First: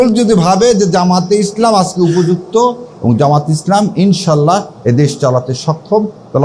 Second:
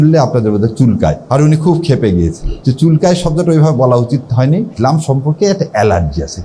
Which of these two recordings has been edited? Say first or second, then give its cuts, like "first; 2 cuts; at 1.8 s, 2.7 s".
second; 3 cuts; at 1.2 s, 2.5 s, 4.7 s